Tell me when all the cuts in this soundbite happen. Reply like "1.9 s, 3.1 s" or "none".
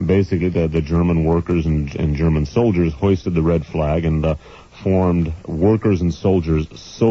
5.3 s